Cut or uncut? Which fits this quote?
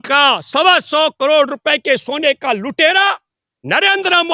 uncut